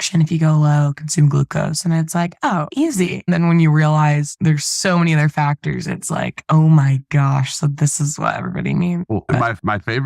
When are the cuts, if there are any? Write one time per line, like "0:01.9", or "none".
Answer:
none